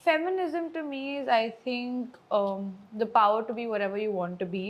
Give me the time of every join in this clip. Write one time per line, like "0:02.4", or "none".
none